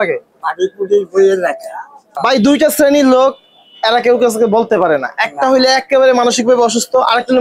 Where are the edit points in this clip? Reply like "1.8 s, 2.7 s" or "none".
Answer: 2.1 s